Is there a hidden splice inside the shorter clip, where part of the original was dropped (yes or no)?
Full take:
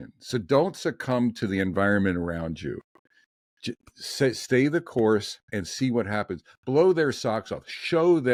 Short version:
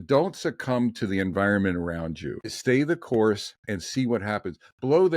yes